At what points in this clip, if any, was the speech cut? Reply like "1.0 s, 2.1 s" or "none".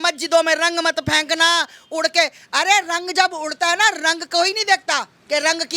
none